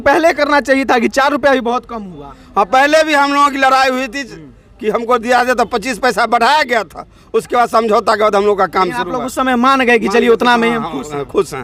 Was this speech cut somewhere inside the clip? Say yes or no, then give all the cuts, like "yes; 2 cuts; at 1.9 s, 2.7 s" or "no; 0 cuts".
no; 0 cuts